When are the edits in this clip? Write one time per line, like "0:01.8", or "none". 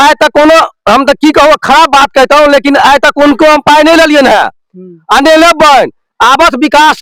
none